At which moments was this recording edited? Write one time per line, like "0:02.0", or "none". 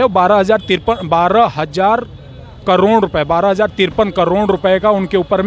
none